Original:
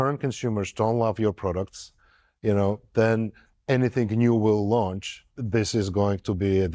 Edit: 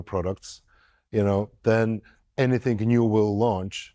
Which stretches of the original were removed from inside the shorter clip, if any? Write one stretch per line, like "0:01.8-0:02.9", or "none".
none